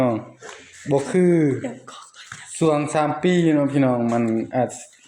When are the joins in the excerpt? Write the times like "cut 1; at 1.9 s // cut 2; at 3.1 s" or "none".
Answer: none